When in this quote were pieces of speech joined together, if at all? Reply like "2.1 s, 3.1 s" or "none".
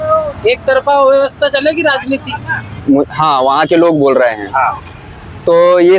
2.7 s